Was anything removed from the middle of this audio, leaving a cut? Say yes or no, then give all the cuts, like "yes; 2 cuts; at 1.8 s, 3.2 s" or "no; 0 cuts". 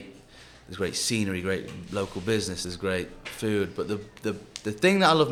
no; 0 cuts